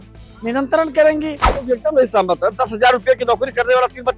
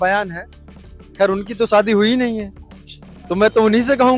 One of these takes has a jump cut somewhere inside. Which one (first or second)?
first